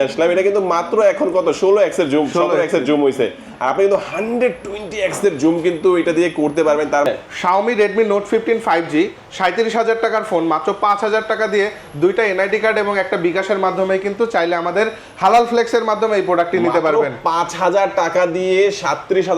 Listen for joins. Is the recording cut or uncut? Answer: cut